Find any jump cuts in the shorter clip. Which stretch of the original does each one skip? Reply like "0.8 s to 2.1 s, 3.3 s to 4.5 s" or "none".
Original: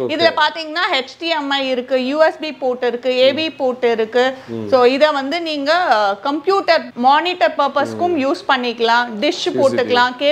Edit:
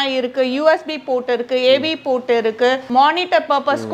4.4 s to 6.9 s